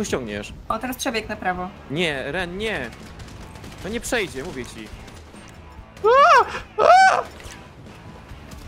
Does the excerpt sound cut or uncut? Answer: uncut